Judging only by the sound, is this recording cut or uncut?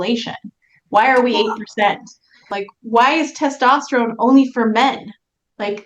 cut